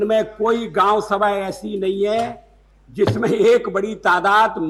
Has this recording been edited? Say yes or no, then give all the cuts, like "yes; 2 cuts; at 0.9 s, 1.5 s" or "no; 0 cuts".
no; 0 cuts